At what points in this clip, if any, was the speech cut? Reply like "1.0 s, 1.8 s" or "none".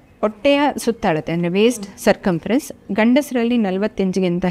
none